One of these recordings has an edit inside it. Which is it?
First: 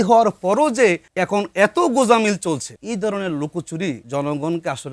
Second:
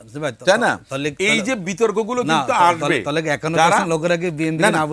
first; 3 cuts; at 1.1 s, 2.7 s, 4.0 s

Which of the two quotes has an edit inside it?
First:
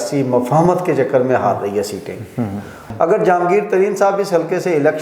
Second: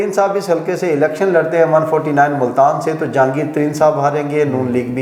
first; 1 cut; at 2.8 s

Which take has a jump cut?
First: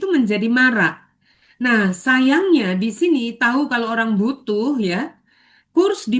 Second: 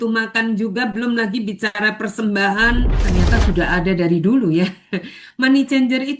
second; 1 cut; at 3.0 s

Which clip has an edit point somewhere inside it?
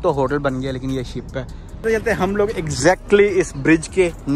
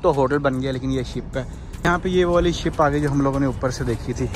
first; 1 cut; at 1.8 s

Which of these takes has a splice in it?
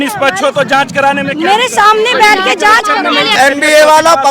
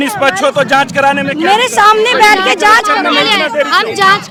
first; 1 cut; at 3.3 s

